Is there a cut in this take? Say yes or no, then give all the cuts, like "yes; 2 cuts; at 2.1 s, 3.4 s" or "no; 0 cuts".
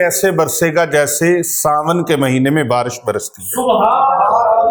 no; 0 cuts